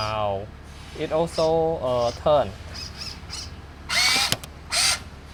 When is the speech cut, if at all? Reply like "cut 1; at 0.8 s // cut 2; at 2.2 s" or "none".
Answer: none